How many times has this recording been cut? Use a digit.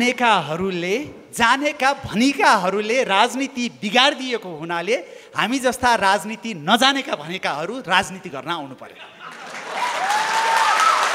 0